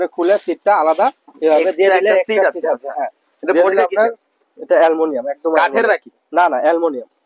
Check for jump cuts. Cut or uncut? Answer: uncut